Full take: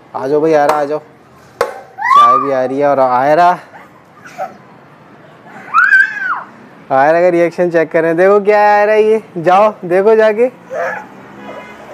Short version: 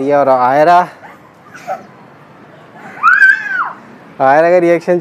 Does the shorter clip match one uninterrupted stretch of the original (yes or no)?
yes